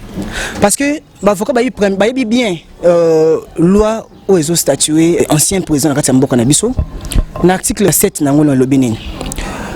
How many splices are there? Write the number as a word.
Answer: two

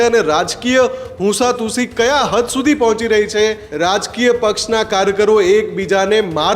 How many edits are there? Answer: one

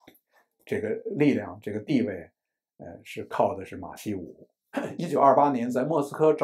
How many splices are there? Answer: one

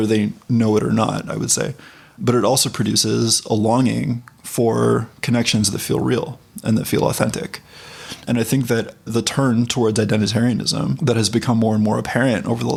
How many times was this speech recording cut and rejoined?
zero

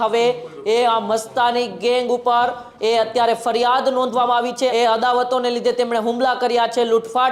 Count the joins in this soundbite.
one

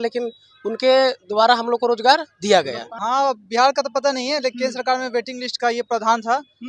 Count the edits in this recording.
one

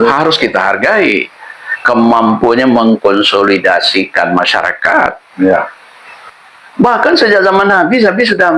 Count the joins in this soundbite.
one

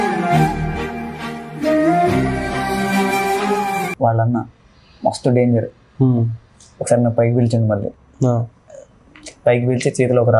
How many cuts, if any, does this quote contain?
one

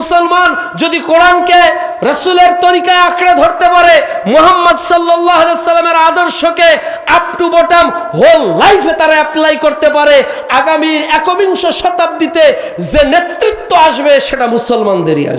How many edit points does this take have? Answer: zero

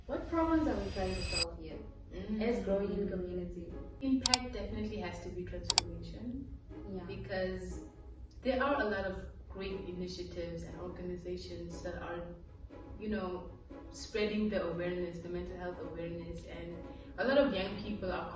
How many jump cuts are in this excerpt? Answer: one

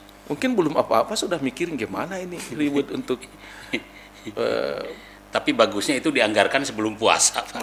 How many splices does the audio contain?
zero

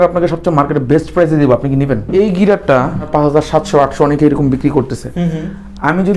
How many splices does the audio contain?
two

